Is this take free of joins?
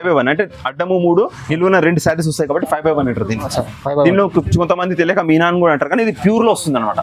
yes; 0 cuts

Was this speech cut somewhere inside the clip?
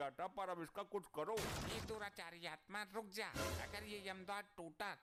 no; 0 cuts

